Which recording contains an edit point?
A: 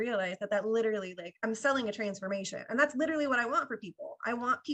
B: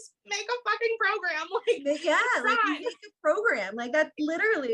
A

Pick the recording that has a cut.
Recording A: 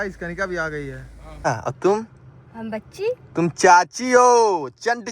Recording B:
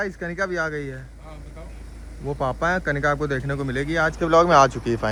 A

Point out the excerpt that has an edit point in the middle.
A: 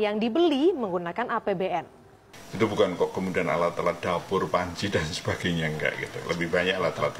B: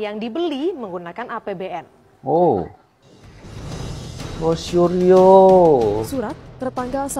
A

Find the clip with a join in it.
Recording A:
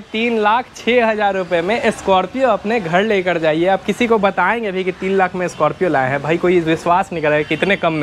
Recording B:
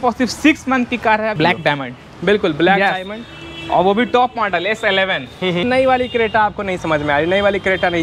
B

